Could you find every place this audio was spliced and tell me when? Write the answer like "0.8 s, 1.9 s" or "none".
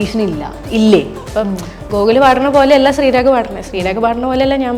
1.3 s

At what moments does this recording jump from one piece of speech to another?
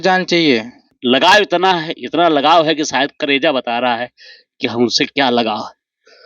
1.0 s

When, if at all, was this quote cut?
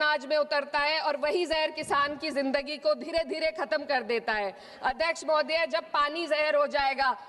none

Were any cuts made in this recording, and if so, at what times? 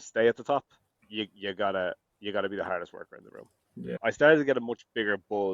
3.9 s

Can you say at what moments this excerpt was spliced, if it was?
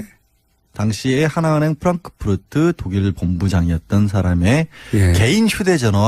none

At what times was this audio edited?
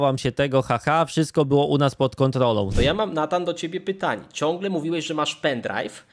2.7 s

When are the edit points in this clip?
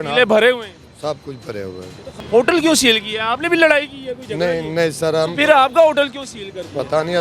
2.1 s

